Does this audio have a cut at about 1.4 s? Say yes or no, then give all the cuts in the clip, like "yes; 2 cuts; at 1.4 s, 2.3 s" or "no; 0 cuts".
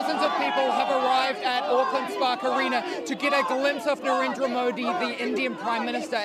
no; 0 cuts